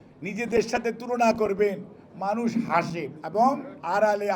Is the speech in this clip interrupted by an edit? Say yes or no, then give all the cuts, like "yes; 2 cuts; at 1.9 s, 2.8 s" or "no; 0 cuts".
yes; 1 cut; at 3.4 s